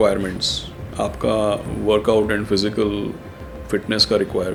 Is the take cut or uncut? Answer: uncut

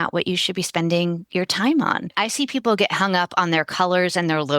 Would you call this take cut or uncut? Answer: cut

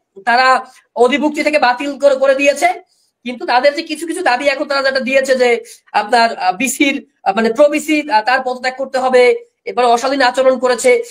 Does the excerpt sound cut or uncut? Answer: uncut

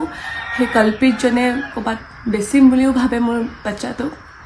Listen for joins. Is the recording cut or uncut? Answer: uncut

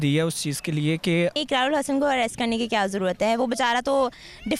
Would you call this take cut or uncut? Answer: cut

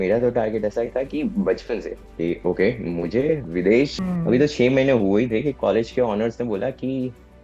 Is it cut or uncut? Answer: cut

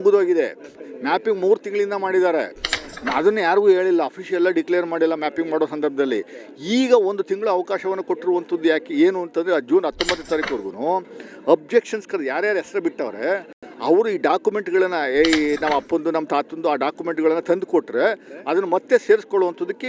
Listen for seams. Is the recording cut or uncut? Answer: uncut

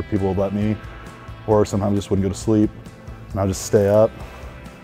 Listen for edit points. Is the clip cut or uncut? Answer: uncut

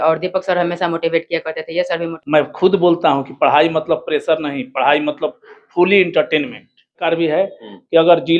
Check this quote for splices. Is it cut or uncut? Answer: cut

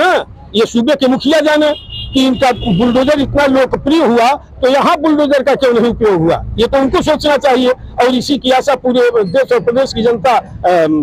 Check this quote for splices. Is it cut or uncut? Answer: uncut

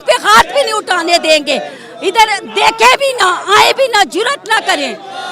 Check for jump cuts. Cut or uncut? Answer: uncut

